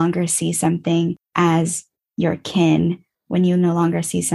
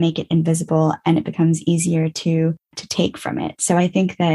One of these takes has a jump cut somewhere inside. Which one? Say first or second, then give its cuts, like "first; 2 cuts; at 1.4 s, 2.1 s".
second; 1 cut; at 2.8 s